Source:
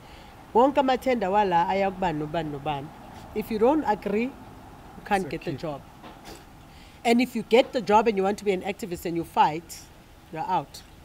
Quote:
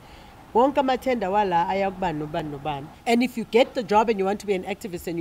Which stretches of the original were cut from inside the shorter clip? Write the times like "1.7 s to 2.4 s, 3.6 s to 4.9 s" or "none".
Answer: 2.4 s to 6.4 s